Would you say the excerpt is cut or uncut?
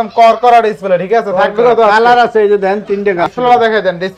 cut